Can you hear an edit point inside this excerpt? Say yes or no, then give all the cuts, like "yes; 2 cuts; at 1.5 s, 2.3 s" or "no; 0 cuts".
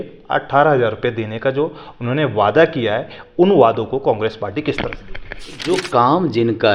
yes; 1 cut; at 5.6 s